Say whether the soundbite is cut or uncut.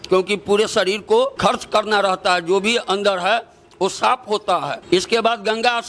cut